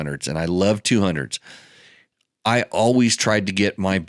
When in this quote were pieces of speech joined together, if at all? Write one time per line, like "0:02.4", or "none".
none